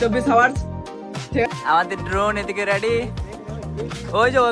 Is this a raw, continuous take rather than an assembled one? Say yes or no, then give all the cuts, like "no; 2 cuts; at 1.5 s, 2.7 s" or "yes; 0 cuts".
no; 1 cut; at 1.5 s